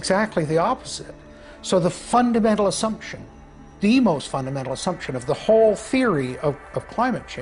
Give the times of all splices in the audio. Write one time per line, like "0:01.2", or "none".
none